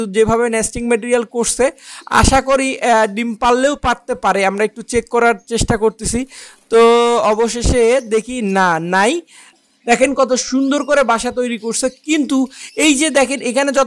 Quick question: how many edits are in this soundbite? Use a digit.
1